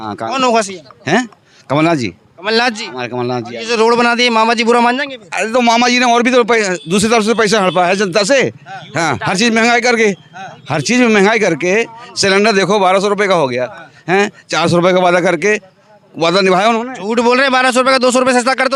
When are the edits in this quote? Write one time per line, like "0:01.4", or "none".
none

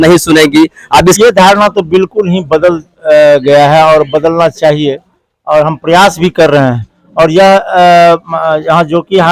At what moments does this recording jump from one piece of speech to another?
0:01.2

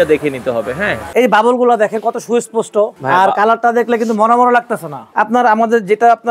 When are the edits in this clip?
0:01.0
0:03.0
0:05.0

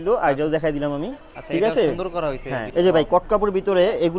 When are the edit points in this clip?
0:02.6

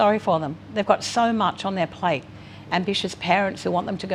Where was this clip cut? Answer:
none

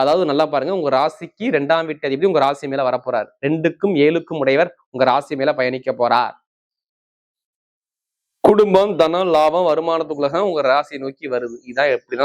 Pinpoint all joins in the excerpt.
none

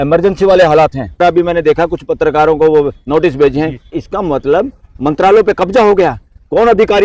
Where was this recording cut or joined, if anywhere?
0:01.2
0:04.0

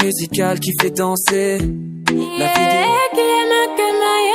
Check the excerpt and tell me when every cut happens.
none

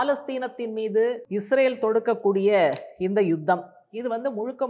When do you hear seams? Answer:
0:01.2

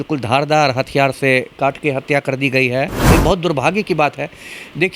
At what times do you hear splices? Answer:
0:03.1

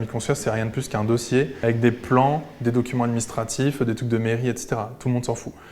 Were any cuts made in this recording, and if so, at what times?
0:01.5

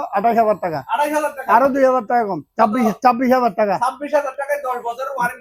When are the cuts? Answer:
none

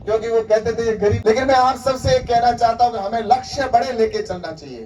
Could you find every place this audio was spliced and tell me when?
0:01.2

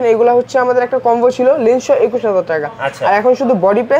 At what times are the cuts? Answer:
none

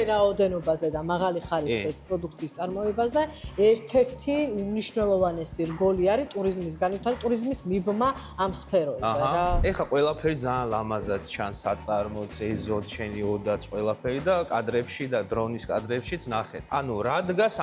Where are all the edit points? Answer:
none

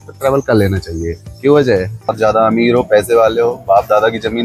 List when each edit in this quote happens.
0:02.1

